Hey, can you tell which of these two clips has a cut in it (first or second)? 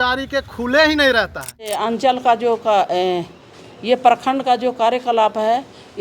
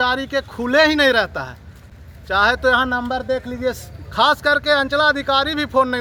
first